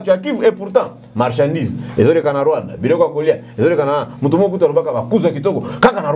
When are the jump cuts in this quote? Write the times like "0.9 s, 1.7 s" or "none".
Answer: none